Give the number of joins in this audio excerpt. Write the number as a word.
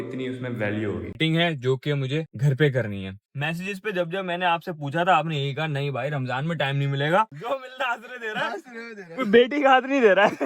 three